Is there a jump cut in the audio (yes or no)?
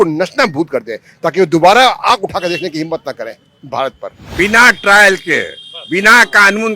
yes